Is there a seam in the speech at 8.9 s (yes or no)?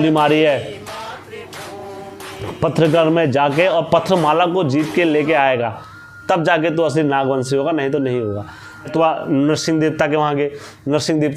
yes